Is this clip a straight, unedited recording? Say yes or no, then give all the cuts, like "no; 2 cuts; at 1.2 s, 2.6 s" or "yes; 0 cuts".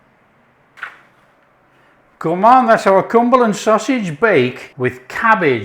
no; 2 cuts; at 0.8 s, 4.6 s